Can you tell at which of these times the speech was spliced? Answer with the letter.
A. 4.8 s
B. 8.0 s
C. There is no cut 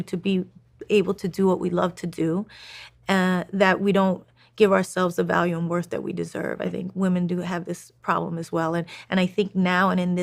C